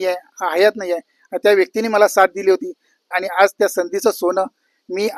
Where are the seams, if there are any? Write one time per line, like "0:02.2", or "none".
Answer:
0:03.1

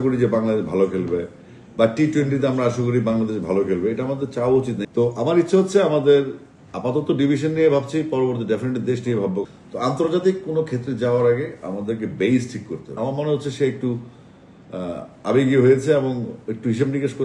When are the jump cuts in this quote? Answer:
0:04.8
0:09.5
0:13.0

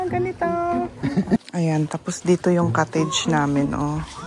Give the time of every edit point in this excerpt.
0:01.4

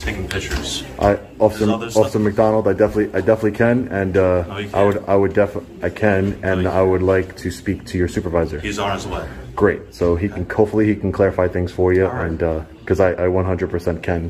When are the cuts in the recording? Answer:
none

